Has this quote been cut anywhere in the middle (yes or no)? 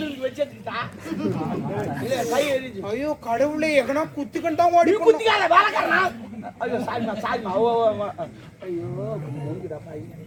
no